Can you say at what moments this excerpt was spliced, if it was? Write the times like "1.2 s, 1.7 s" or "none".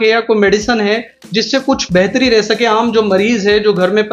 none